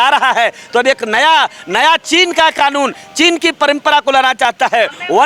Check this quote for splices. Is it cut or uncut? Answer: uncut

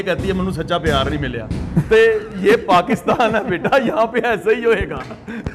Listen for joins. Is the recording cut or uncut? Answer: uncut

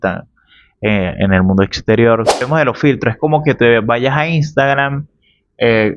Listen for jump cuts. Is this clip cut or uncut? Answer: cut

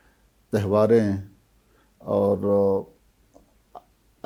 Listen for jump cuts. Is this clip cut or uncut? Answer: uncut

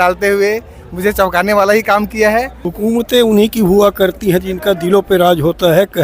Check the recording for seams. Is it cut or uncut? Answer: cut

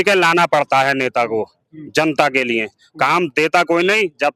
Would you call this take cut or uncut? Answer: uncut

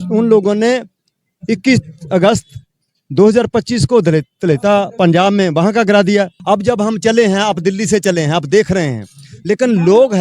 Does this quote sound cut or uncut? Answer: cut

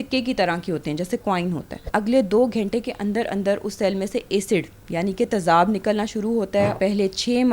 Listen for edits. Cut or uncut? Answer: cut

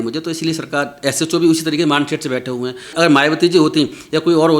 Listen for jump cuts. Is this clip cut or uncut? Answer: cut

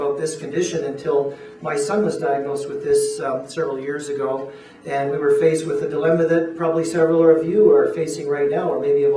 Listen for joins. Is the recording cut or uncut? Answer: uncut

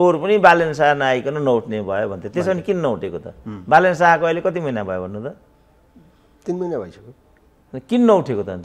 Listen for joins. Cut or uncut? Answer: uncut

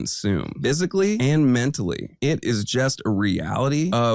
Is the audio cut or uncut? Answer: uncut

